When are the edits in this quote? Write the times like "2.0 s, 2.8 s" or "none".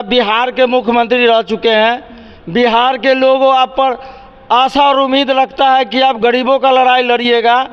none